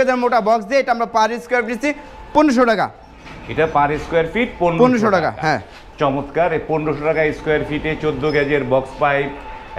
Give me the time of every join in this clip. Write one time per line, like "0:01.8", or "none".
none